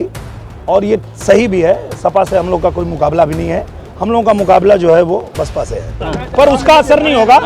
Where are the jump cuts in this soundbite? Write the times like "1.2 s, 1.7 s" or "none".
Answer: 6.1 s